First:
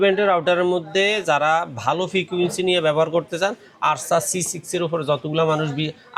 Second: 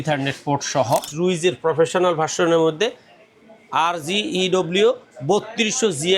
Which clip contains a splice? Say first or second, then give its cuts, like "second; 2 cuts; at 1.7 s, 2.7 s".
second; 1 cut; at 1.1 s